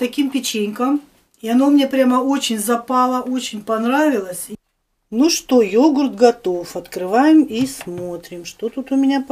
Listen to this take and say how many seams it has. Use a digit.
1